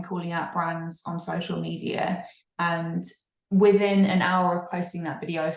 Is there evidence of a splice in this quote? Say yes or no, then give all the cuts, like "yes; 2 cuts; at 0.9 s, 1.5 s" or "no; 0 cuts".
no; 0 cuts